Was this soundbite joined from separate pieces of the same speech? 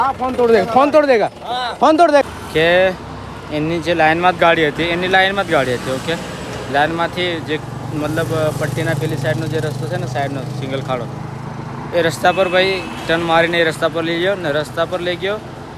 yes; 1 cut; at 2.2 s

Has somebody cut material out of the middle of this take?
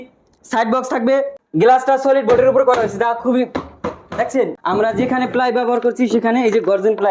yes; 2 cuts; at 1.4 s, 4.6 s

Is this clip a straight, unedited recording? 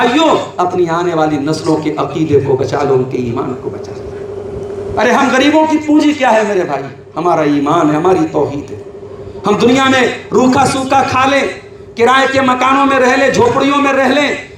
yes; 0 cuts

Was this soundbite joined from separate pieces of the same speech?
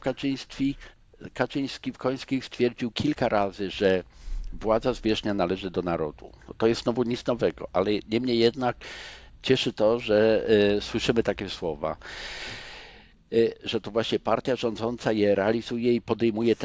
no; 0 cuts

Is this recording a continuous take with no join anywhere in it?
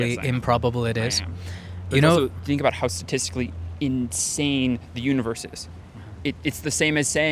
yes; 0 cuts

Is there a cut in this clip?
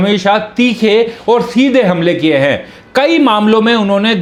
no; 0 cuts

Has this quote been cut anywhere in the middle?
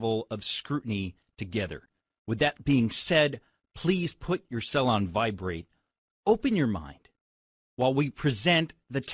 no; 0 cuts

